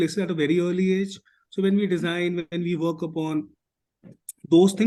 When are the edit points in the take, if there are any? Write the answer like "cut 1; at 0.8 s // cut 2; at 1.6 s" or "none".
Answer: none